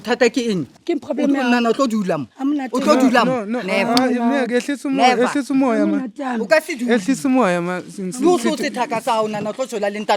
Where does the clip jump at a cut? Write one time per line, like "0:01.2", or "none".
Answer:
none

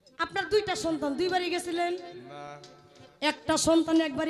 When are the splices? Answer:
none

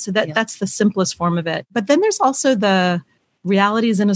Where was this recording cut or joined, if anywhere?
0:01.6

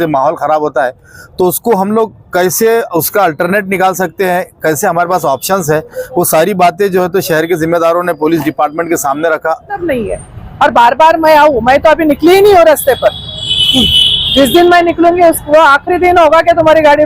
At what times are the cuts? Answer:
0:09.8

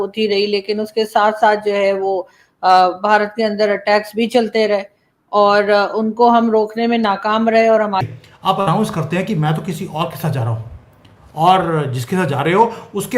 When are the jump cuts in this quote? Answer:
0:08.0

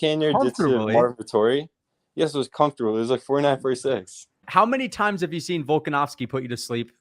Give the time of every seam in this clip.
0:04.4

